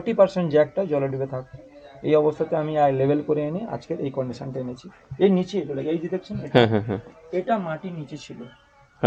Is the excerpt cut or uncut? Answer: uncut